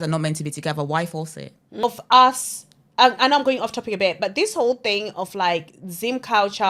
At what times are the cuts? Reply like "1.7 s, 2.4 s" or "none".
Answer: 1.8 s